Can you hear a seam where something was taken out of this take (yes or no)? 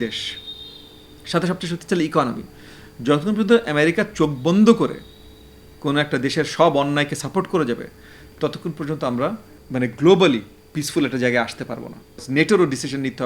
yes